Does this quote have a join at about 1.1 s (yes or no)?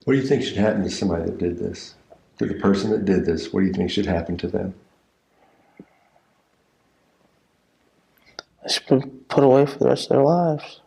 no